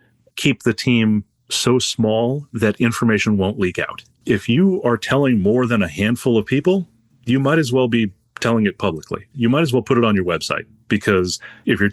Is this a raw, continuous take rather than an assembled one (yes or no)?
no